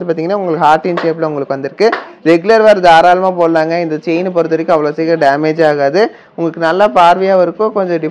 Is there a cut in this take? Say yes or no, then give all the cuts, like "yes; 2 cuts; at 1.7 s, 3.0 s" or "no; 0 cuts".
no; 0 cuts